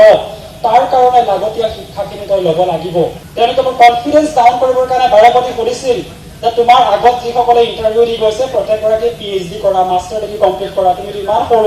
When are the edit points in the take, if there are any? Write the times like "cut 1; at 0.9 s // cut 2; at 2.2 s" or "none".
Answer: cut 1; at 3.2 s